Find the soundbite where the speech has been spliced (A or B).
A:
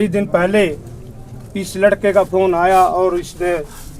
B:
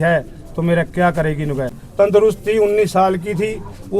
B